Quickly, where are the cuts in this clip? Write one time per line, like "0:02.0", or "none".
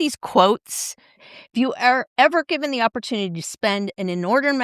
0:01.2